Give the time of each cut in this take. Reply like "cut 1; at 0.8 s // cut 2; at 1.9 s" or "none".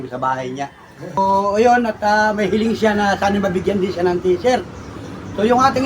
cut 1; at 1.2 s